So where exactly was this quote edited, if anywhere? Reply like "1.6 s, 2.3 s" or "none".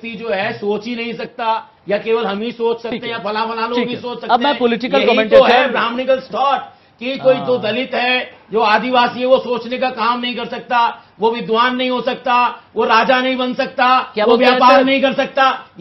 none